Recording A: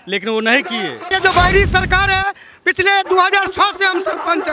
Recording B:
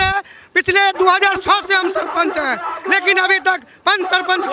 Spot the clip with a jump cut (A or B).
A